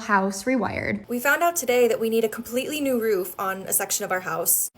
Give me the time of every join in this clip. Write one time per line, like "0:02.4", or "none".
0:01.0

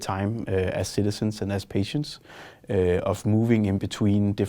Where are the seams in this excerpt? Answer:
none

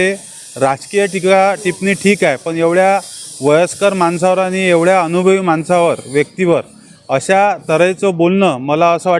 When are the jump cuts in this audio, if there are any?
none

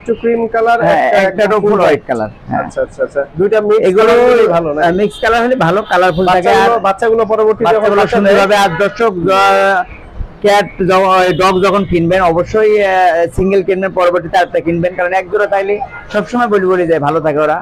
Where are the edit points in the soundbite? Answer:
none

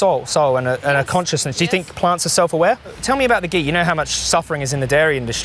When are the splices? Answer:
0:03.0

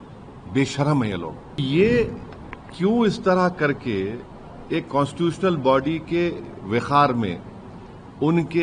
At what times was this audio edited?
0:01.6

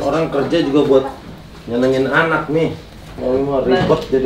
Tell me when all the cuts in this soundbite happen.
0:03.1

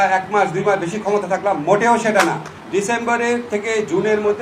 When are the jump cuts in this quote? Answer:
0:02.5

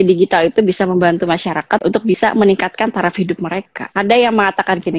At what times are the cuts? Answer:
0:02.0
0:03.8

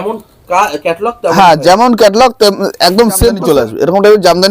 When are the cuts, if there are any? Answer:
0:03.4

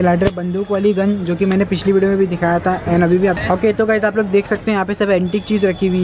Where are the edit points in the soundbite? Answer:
0:03.4

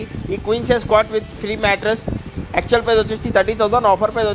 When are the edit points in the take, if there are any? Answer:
none

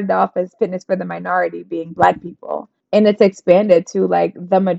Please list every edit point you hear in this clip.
0:02.7

